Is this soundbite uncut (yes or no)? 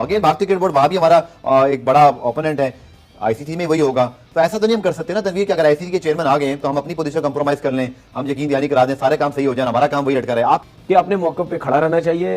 no